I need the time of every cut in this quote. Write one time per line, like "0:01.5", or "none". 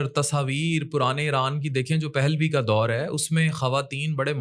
none